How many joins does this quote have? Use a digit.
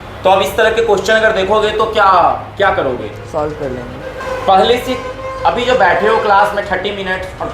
1